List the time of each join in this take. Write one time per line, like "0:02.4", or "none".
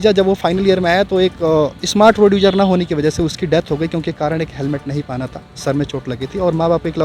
none